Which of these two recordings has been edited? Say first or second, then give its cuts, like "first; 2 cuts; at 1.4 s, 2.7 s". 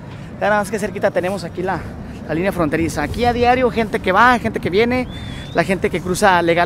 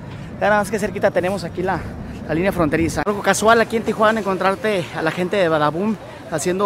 second; 1 cut; at 3.0 s